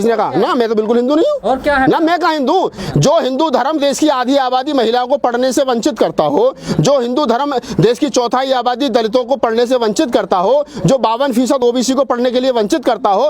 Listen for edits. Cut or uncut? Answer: cut